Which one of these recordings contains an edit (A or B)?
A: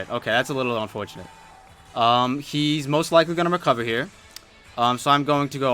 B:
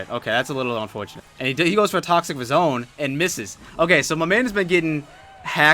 B